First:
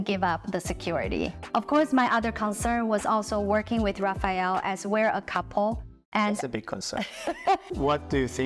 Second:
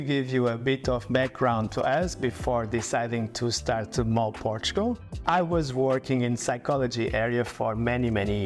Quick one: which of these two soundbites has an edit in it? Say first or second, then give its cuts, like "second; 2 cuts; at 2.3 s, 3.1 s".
first; 2 cuts; at 1.4 s, 7.7 s